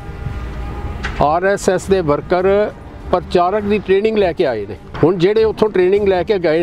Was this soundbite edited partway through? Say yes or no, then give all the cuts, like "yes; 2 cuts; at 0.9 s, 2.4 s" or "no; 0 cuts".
yes; 1 cut; at 4.9 s